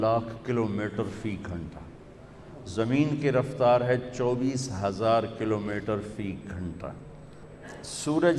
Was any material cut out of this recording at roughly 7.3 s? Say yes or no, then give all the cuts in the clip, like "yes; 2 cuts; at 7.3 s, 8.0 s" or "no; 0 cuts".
yes; 1 cut; at 7.3 s